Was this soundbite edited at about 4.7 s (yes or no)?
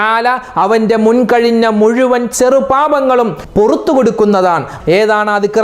yes